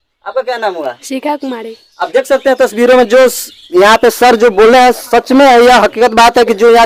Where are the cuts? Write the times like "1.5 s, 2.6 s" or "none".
none